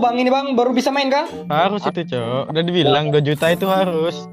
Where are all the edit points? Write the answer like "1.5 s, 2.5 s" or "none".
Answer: 1.4 s

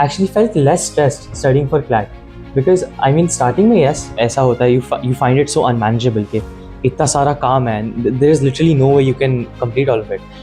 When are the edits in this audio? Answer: none

